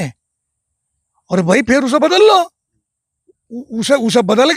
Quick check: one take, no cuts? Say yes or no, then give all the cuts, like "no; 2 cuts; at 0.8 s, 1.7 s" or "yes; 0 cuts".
yes; 0 cuts